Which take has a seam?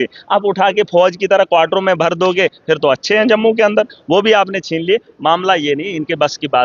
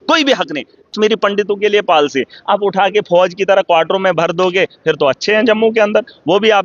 second; 1 cut; at 0.9 s

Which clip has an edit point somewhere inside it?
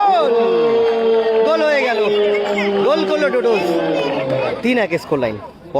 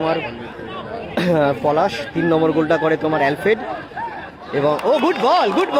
first; 1 cut; at 4.6 s

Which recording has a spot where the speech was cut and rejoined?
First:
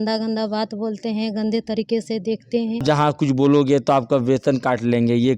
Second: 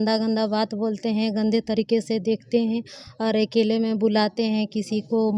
first; 1 cut; at 2.8 s

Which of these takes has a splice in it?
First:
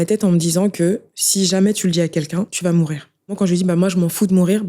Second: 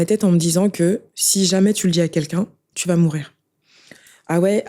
first; 2 cuts; at 2.5 s, 3.4 s

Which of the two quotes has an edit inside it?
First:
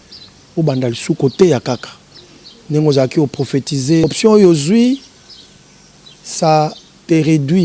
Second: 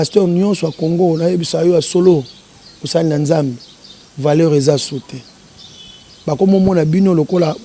first; 1 cut; at 4.0 s

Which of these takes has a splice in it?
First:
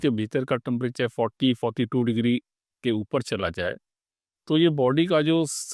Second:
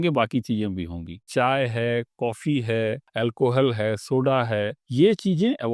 second; 3 cuts; at 1.1 s, 3.1 s, 4.8 s

